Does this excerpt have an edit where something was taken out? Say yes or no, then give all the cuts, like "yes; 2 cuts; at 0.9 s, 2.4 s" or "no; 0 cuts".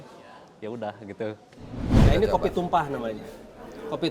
yes; 1 cut; at 2.0 s